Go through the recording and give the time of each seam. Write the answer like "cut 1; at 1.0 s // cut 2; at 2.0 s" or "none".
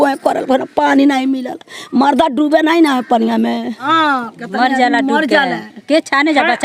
cut 1; at 3.9 s